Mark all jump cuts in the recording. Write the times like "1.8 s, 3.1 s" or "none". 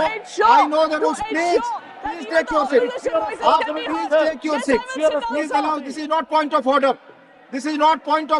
none